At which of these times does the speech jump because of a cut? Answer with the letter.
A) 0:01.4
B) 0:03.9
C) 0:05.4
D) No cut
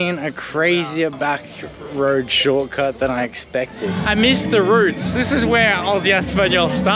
B